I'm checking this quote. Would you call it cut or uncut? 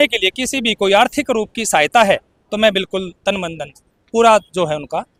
uncut